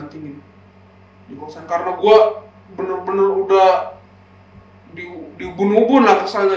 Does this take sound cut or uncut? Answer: uncut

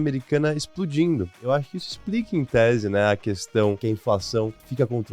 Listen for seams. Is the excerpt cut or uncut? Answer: cut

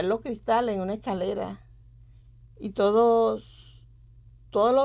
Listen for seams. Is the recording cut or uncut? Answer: uncut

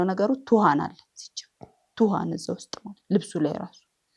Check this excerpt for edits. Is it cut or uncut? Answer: uncut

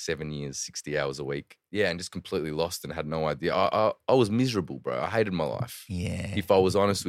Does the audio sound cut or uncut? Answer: cut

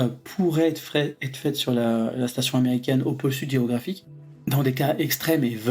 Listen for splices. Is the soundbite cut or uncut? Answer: uncut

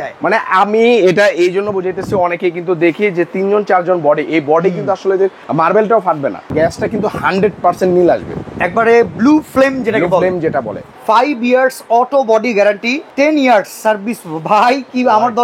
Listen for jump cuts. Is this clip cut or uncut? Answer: cut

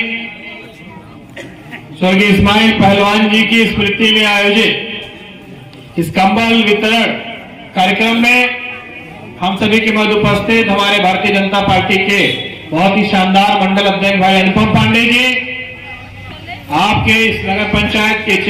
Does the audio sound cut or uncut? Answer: uncut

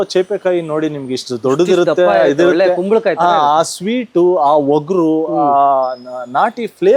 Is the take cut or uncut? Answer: uncut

